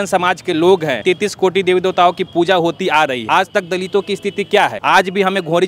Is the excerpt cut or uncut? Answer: cut